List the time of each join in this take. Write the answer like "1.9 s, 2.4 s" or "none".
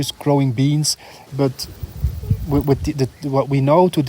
1.2 s